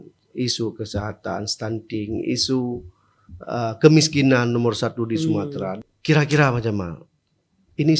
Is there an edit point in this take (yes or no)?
yes